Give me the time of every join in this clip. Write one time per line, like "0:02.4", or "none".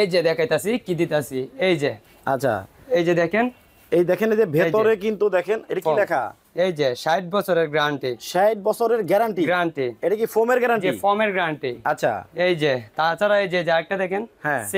none